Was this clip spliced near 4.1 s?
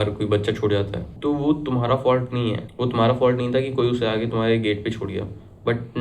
no; 2 cuts; at 1.0 s, 2.7 s

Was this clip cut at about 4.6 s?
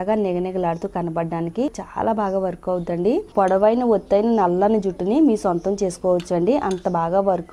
no; 2 cuts; at 1.8 s, 3.3 s

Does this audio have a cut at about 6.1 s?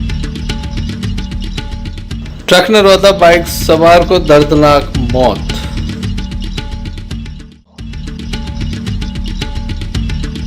no; 1 cut; at 1.4 s

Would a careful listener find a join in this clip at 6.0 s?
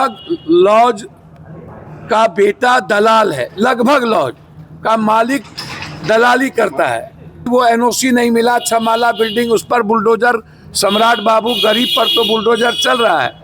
no; 1 cut; at 7.4 s

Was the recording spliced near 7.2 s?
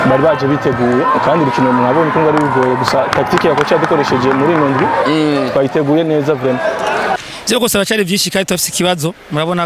yes; 1 cut; at 7.2 s

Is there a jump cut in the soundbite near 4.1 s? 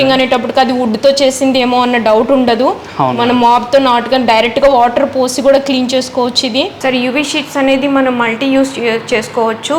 no; 1 cut; at 6.7 s

